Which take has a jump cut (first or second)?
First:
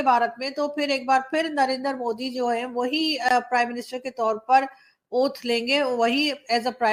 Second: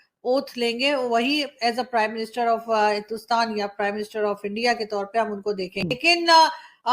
second